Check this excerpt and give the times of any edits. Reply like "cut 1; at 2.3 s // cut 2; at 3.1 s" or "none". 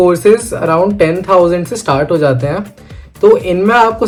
none